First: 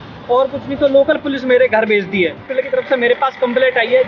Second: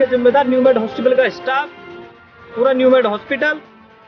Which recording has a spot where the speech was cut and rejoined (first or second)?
first